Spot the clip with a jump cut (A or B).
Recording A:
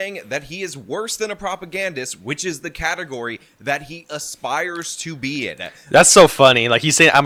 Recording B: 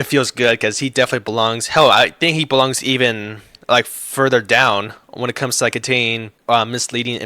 B